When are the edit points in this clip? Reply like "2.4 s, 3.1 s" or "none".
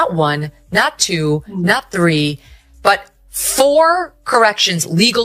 none